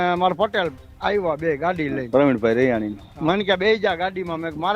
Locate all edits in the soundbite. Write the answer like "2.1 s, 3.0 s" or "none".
3.1 s